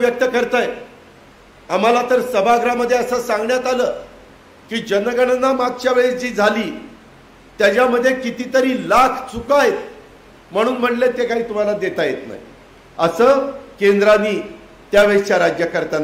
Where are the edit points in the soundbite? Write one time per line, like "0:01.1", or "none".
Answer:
none